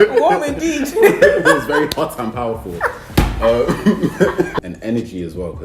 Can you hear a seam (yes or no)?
yes